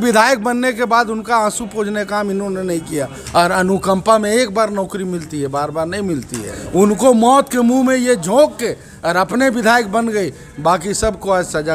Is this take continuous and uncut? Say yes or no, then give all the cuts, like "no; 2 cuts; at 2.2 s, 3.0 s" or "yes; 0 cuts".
no; 2 cuts; at 3.2 s, 6.6 s